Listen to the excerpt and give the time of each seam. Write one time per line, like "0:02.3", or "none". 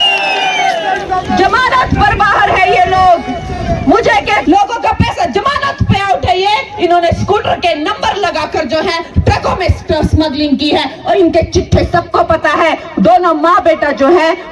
0:04.4